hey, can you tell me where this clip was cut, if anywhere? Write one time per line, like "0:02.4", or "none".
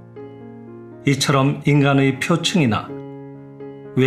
0:01.0